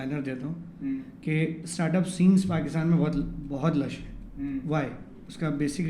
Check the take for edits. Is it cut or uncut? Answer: uncut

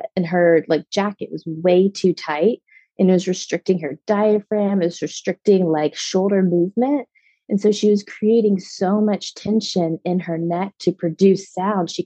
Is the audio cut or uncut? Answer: uncut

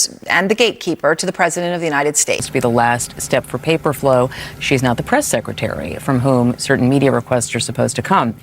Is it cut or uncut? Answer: cut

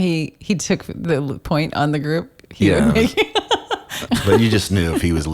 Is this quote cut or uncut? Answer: cut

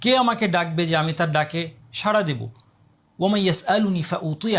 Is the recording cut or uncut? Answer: uncut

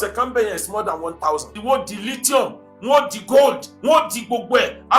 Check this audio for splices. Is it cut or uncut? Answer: cut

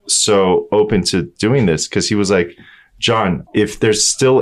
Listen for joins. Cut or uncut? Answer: cut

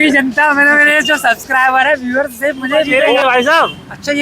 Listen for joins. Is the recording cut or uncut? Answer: cut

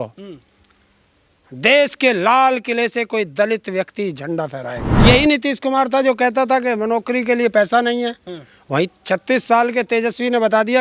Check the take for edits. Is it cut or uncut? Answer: cut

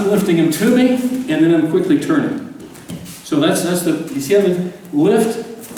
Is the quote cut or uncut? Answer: uncut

